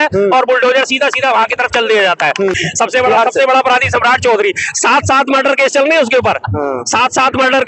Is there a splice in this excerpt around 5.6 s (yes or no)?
no